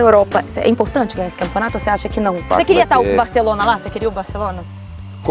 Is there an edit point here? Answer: yes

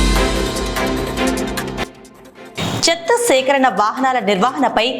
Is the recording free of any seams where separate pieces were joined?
no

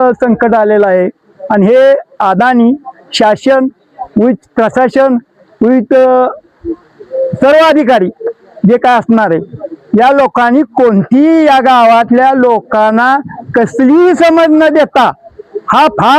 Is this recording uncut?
yes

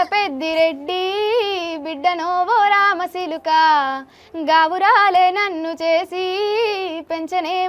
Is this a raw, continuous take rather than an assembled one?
yes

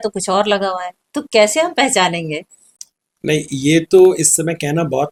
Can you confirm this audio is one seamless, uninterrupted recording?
yes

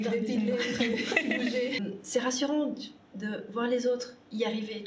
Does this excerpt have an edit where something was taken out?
yes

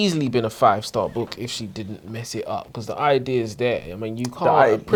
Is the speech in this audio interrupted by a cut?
no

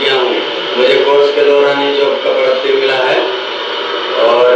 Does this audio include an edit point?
no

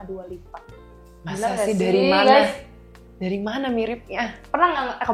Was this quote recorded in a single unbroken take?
yes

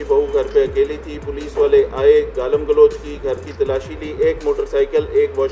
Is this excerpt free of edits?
yes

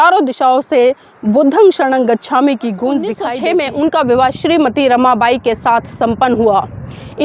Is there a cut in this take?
yes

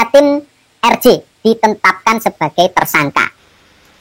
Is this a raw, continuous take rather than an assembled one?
yes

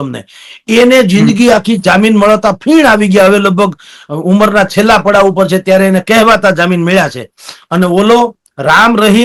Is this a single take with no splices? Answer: yes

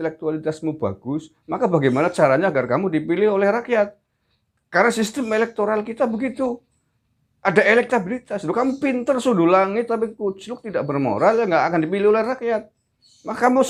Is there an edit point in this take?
no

